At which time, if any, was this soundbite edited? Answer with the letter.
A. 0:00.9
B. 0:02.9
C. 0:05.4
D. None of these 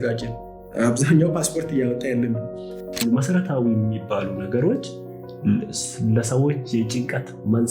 B